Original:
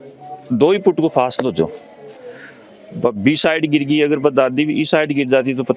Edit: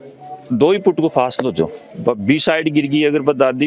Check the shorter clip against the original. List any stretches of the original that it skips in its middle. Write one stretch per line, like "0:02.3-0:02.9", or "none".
0:01.9-0:02.8